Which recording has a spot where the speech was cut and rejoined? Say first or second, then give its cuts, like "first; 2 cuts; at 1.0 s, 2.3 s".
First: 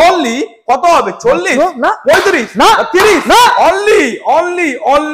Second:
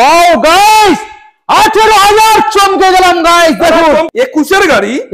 second; 1 cut; at 4.1 s